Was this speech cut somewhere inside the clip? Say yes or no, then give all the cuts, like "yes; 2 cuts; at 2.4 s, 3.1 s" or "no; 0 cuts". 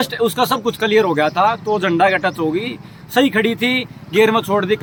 no; 0 cuts